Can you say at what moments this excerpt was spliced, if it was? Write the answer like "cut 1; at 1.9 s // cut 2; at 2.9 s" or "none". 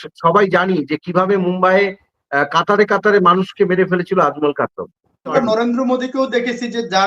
cut 1; at 5.3 s